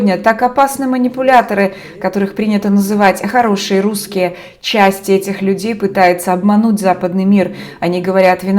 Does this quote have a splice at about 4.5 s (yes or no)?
no